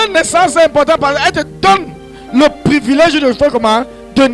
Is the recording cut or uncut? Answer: uncut